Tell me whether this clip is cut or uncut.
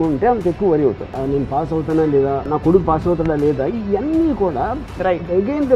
cut